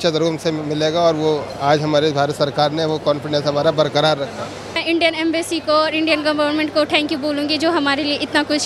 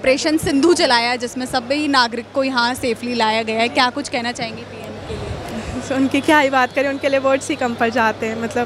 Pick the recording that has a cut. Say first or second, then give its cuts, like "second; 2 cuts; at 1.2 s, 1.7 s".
first; 1 cut; at 4.8 s